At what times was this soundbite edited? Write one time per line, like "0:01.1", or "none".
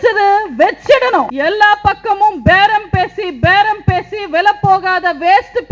0:01.3